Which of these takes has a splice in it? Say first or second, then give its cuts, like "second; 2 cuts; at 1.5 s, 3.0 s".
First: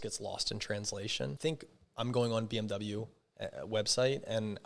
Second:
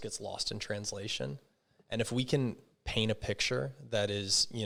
first; 1 cut; at 1.4 s